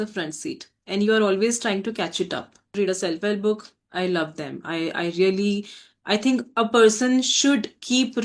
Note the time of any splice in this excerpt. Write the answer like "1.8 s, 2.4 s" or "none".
2.7 s